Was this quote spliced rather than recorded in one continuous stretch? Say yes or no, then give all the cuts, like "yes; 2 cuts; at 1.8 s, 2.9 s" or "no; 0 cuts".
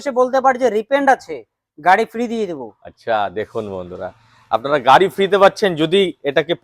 no; 0 cuts